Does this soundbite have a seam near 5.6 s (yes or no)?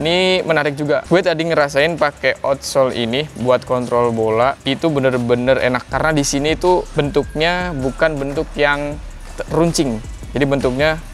no